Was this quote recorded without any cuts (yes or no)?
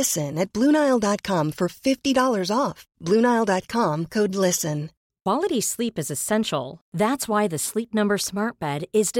no